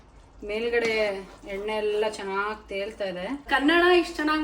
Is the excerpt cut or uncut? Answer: cut